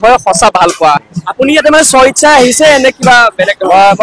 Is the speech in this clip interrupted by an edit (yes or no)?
yes